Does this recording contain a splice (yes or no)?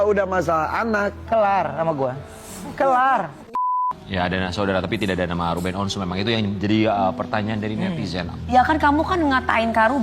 yes